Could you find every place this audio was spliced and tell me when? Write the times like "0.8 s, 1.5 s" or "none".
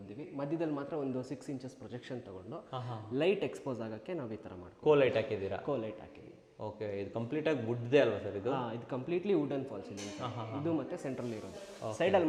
none